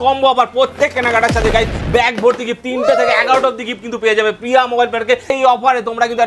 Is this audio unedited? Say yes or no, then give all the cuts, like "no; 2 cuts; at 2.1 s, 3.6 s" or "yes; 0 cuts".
no; 1 cut; at 5.3 s